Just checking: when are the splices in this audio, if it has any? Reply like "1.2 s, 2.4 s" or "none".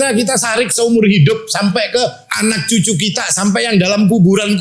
2.2 s

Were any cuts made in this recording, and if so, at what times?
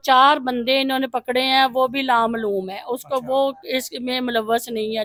none

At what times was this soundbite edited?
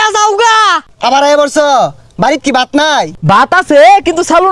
0.9 s, 3.2 s

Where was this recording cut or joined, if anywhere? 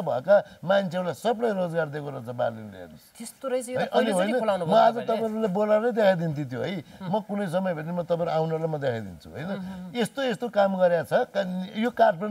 none

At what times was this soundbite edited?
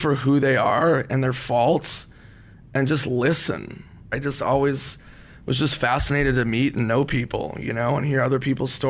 4.1 s

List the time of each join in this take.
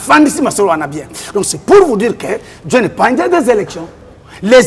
none

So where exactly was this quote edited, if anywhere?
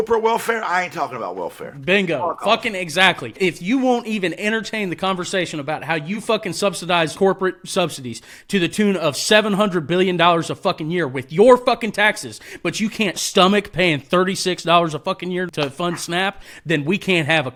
none

